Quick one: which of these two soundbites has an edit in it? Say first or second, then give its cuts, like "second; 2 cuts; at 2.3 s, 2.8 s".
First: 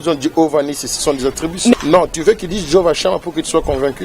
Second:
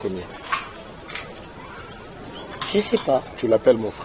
first; 1 cut; at 1.7 s